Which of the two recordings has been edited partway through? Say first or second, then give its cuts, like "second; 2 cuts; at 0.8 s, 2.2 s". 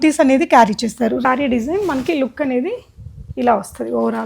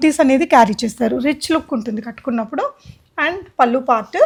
first; 1 cut; at 1.2 s